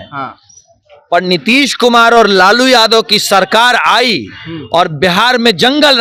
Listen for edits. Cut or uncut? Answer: uncut